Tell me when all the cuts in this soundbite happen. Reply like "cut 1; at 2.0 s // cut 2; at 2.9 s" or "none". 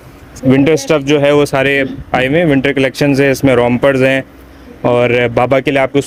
none